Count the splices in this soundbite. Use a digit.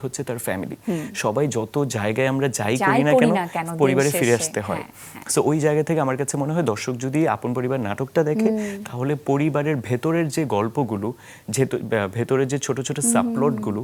0